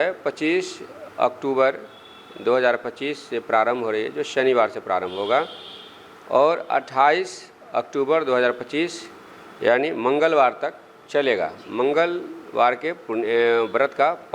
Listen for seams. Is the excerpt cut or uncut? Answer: uncut